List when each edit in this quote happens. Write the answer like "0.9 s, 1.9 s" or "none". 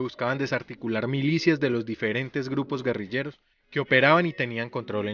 2.7 s